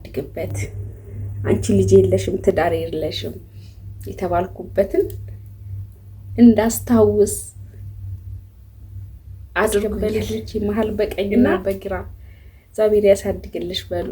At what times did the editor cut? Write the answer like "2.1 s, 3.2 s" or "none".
9.8 s